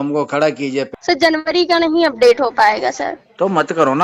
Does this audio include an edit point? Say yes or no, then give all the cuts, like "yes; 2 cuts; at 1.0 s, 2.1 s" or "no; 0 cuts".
yes; 1 cut; at 0.9 s